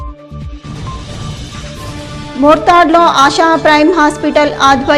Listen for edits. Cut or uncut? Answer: cut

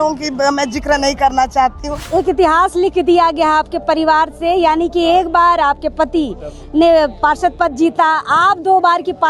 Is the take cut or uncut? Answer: cut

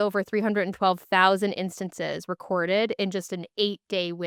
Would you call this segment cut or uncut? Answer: uncut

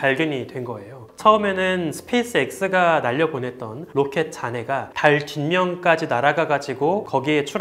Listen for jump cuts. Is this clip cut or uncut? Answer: cut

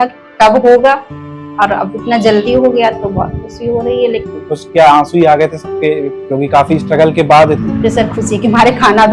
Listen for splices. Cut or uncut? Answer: cut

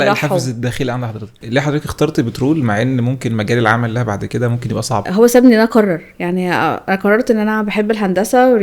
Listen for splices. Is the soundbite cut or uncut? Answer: cut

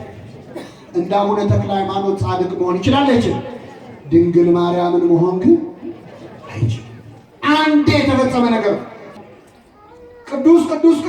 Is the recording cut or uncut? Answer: cut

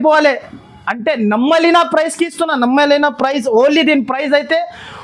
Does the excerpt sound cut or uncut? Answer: uncut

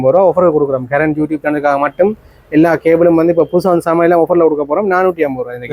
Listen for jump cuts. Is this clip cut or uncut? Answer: uncut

